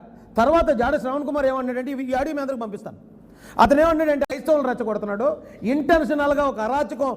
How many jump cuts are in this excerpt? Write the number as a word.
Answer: one